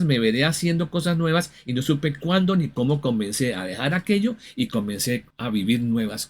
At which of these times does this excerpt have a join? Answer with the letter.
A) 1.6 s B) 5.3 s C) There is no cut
B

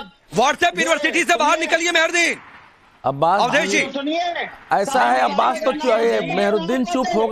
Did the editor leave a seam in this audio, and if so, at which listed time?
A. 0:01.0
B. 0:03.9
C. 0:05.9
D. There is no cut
A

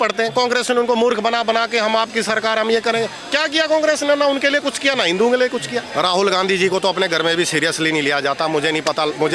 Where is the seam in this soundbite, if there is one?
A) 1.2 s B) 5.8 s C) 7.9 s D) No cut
B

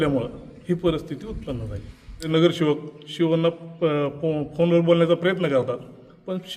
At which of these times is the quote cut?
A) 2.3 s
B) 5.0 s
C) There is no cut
A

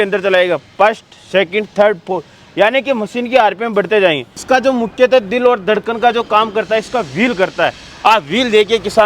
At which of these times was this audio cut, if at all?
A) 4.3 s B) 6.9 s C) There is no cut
A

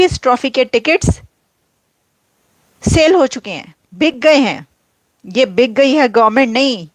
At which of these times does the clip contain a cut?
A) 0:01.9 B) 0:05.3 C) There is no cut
C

